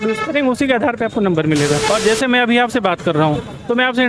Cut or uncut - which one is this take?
cut